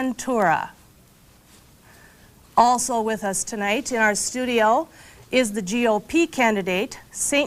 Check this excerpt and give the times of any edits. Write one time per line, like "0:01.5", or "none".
0:03.5